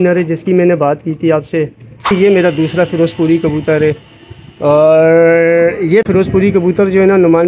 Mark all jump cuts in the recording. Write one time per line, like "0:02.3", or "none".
0:02.1
0:06.1